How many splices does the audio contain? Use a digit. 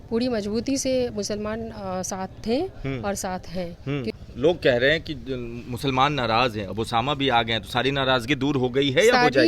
1